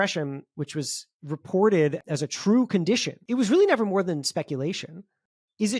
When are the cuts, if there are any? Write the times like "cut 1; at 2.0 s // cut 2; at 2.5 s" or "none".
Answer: cut 1; at 2.0 s // cut 2; at 3.1 s